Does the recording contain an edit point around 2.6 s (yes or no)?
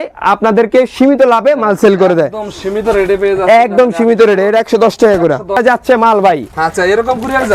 no